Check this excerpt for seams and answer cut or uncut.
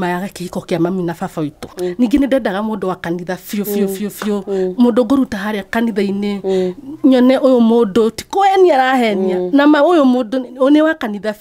cut